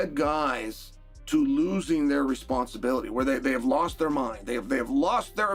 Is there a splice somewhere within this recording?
no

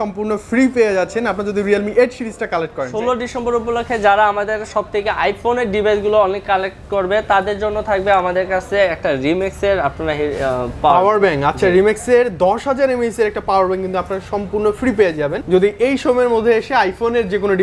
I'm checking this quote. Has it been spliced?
yes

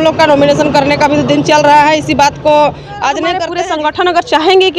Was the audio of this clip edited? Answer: yes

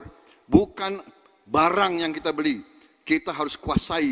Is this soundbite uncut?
yes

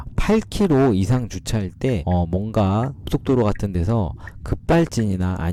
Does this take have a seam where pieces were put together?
no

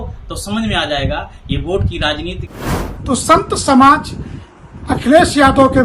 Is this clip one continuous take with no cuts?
no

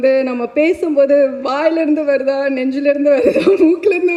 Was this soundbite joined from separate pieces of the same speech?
no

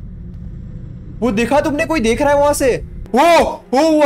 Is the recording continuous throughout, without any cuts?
no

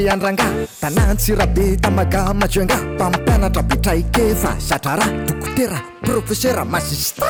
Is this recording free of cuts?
yes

